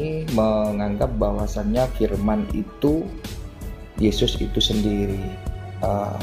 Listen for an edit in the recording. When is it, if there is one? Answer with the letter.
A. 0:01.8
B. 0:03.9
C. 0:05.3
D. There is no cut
D